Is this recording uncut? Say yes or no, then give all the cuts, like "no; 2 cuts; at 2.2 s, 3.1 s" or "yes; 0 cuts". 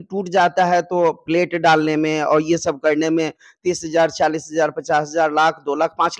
yes; 0 cuts